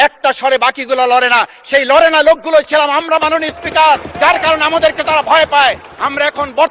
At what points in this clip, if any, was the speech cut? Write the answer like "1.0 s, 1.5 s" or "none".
none